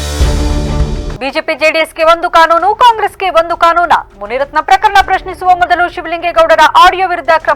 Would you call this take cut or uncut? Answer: uncut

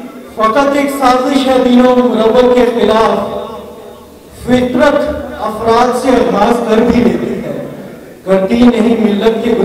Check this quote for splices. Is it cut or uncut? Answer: uncut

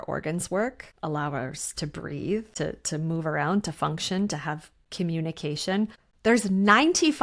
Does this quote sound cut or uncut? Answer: cut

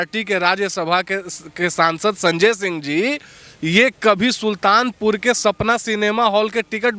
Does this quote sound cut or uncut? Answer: uncut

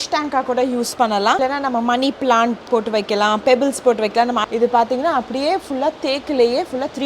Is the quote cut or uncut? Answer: cut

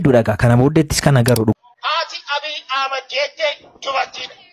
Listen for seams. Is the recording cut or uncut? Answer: cut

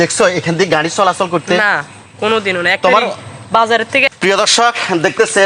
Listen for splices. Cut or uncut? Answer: cut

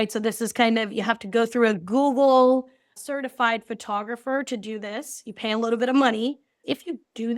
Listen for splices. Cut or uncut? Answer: cut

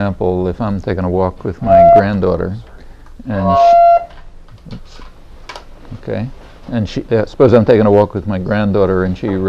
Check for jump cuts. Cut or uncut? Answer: uncut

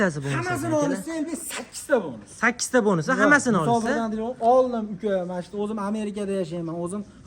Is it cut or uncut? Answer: uncut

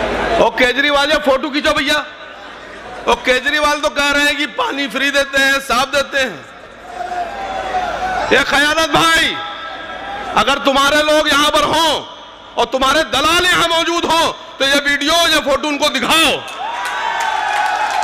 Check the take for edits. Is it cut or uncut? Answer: uncut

